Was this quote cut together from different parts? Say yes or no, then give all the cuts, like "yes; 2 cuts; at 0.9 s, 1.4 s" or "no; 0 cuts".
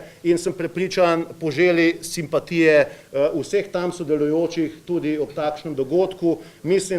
no; 0 cuts